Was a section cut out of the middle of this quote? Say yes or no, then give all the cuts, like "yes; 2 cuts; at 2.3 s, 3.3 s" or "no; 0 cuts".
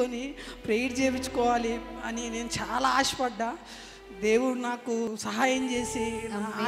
yes; 1 cut; at 5.1 s